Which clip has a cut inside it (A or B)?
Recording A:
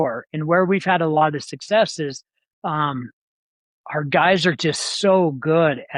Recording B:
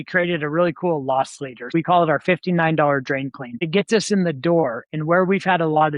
B